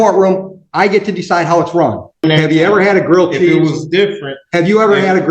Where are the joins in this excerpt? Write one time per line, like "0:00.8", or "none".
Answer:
0:02.2